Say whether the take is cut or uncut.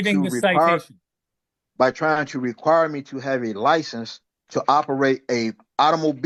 uncut